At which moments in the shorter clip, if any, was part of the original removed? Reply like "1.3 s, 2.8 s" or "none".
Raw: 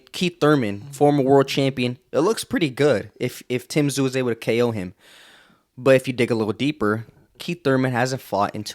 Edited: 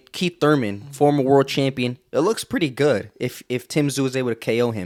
none